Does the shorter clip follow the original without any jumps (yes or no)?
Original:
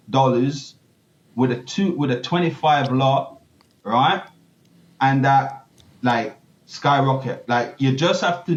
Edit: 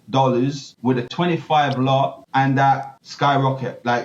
no